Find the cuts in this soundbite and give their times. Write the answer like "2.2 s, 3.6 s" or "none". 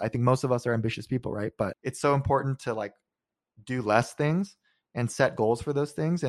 1.8 s